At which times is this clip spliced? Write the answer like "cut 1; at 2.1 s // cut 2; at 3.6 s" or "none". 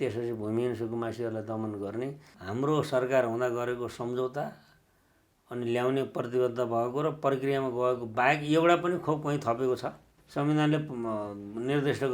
cut 1; at 2.3 s // cut 2; at 10.1 s

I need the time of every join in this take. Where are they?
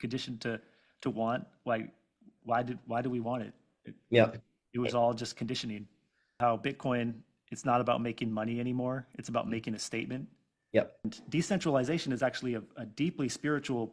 cut 1; at 6.4 s // cut 2; at 11.1 s

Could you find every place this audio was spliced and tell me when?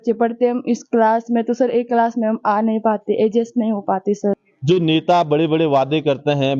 cut 1; at 4.5 s

